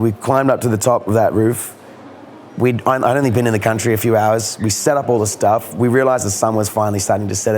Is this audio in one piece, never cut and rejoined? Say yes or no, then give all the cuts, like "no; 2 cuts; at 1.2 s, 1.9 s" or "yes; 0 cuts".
yes; 0 cuts